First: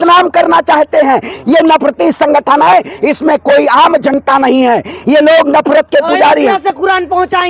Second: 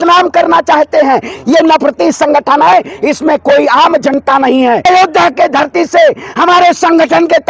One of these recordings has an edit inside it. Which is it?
second; 1 cut; at 4.9 s

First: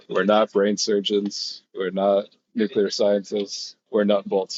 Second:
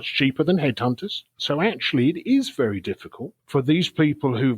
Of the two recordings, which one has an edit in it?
second; 1 cut; at 1.4 s

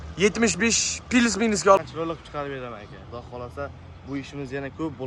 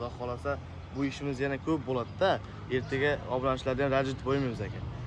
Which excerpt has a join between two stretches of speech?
first; 1 cut; at 1.8 s

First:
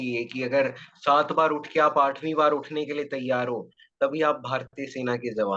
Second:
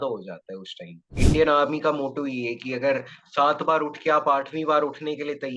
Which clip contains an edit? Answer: second; 1 cut; at 1.1 s

